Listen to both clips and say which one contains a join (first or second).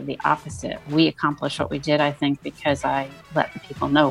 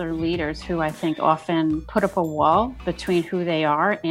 second